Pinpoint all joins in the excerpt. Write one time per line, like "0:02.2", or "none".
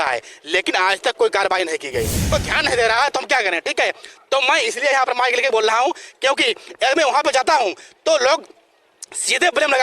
0:02.3